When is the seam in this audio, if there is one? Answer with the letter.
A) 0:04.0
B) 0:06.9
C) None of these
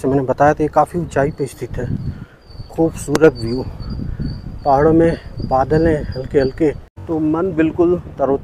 B